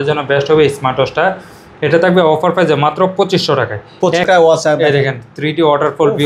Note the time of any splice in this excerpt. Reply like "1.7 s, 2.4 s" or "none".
4.2 s

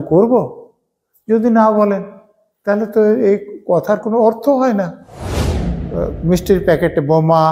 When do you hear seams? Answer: 5.5 s

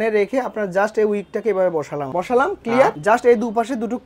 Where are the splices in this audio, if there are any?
2.1 s

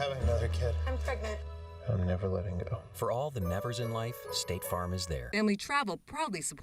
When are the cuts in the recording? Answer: 5.2 s

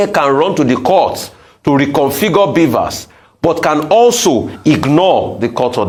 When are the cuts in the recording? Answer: none

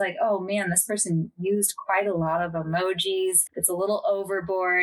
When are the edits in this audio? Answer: none

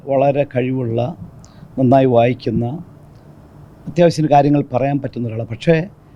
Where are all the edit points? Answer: none

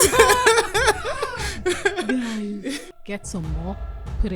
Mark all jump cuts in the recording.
2.9 s

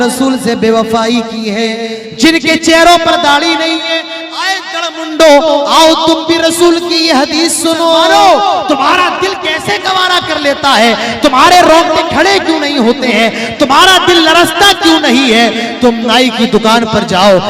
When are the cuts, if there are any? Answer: 1.7 s, 7.9 s

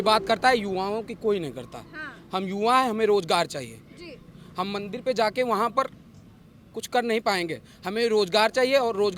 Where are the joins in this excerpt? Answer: none

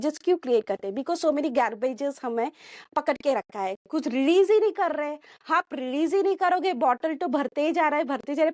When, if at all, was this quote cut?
none

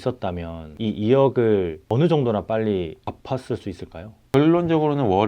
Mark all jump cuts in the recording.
1.8 s, 3.0 s, 4.2 s

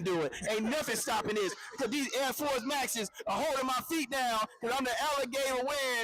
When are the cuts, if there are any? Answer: none

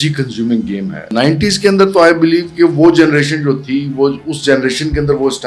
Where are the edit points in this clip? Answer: 1.1 s

